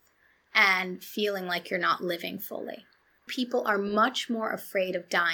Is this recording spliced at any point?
yes; 1 cut; at 3.3 s

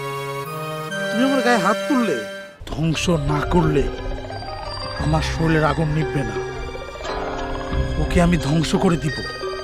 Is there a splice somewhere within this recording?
yes; 1 cut; at 2.5 s

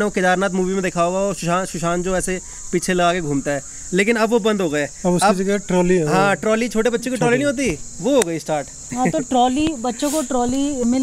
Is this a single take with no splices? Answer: yes; 0 cuts

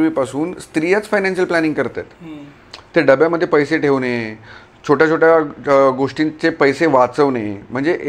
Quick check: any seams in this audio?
no; 0 cuts

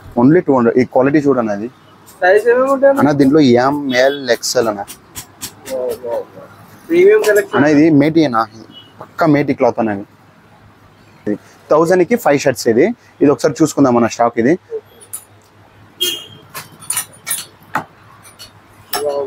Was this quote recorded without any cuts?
no; 1 cut; at 11.4 s

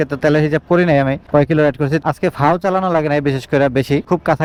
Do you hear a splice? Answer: no; 0 cuts

